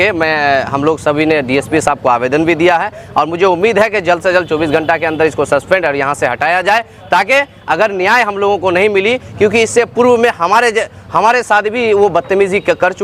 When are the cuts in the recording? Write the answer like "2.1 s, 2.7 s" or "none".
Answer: none